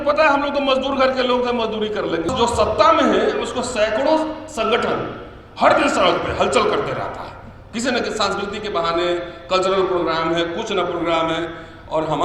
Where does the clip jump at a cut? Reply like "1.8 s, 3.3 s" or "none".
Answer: 2.3 s